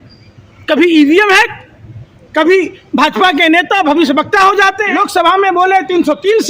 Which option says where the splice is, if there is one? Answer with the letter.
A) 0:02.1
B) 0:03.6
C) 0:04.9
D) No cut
C